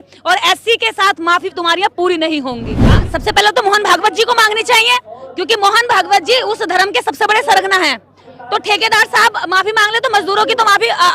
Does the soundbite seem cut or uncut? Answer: cut